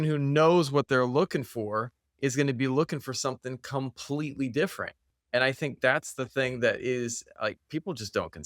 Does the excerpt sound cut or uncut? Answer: cut